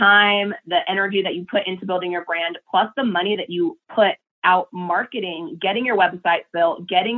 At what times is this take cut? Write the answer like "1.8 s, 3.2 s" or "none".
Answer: none